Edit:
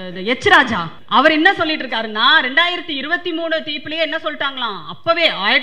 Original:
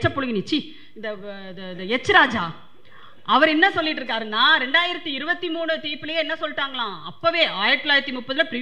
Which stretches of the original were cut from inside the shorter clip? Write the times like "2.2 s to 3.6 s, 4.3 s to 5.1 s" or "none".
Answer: 2.6 s to 3.1 s